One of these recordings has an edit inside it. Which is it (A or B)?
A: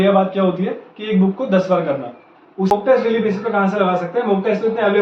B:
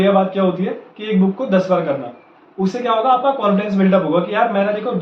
A